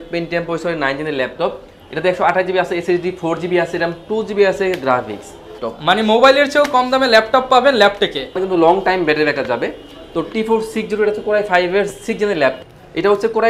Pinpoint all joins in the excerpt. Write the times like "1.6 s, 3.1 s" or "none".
5.7 s, 8.4 s, 12.6 s